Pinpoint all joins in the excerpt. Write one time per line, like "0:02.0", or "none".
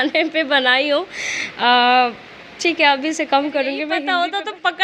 0:03.9